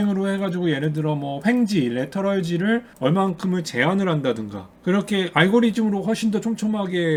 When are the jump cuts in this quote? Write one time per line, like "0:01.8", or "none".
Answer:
none